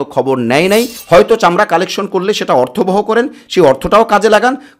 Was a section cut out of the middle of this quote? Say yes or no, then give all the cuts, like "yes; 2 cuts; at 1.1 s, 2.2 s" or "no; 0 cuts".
yes; 1 cut; at 1.0 s